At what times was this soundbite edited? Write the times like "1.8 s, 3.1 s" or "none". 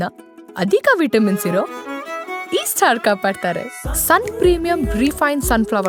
none